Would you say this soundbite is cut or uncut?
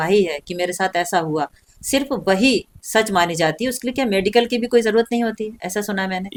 uncut